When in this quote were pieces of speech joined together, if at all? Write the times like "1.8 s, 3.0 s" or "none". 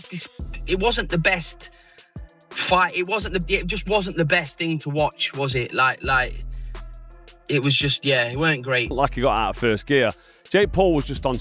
8.9 s